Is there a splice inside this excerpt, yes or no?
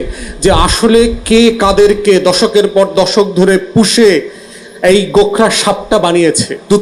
no